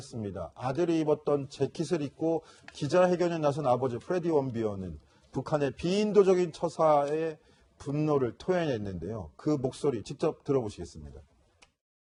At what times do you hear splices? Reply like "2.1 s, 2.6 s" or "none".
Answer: none